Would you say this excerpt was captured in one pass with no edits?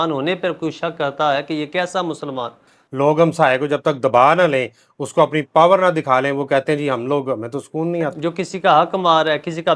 no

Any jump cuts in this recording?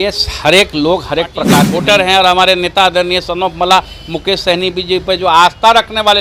yes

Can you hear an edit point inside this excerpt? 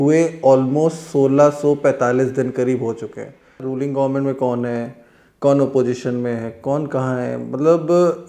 yes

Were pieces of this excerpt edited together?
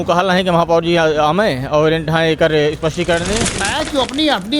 yes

